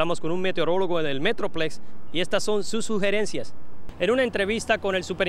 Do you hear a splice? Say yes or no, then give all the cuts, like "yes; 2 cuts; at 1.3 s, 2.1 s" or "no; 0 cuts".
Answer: yes; 1 cut; at 3.8 s